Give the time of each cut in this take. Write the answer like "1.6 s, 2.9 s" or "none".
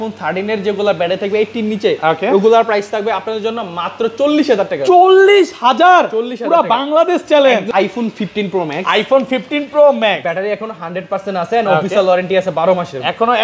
7.8 s